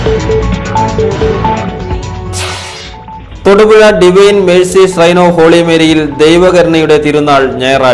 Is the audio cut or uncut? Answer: cut